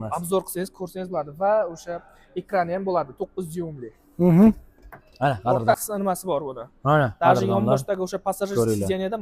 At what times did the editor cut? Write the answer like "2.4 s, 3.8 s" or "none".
5.8 s